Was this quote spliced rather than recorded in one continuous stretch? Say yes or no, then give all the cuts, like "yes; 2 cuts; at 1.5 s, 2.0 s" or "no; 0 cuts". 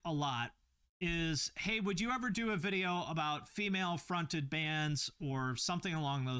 yes; 1 cut; at 3.5 s